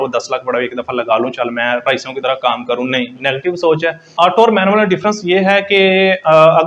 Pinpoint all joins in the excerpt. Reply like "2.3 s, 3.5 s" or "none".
4.0 s